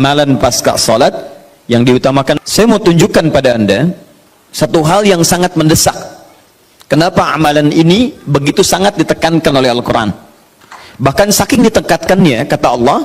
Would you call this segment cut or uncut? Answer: cut